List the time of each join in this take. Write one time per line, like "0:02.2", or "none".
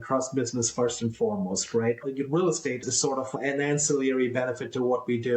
0:02.0
0:03.3